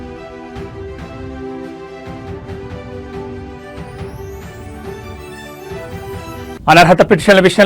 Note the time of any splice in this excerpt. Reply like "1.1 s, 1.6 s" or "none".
6.5 s